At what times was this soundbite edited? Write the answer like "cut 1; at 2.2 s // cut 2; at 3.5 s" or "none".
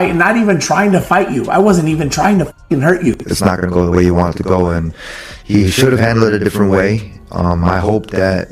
cut 1; at 3.2 s